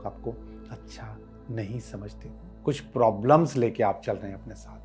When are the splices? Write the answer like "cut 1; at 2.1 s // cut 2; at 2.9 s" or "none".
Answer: cut 1; at 2.5 s